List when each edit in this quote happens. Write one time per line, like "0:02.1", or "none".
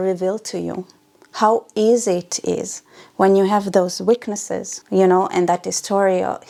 none